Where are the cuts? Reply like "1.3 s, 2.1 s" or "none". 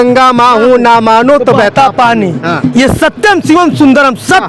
none